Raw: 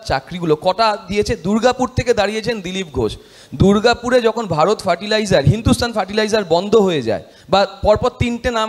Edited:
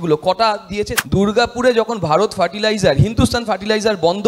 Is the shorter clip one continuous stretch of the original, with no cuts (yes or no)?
no